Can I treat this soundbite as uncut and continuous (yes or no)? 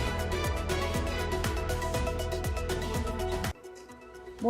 no